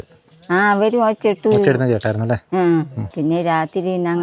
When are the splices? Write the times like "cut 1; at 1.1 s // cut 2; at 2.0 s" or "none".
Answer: cut 1; at 3.1 s